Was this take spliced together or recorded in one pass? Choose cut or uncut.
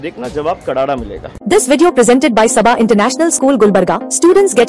cut